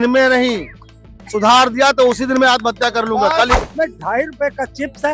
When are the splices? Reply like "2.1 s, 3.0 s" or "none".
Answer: 3.5 s